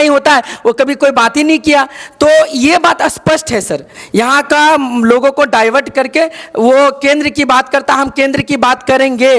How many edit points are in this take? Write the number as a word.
zero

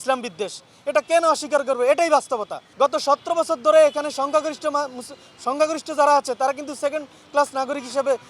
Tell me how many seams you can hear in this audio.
one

